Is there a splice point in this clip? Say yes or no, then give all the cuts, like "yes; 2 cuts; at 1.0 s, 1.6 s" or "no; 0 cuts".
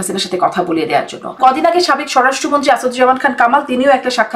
yes; 1 cut; at 1.4 s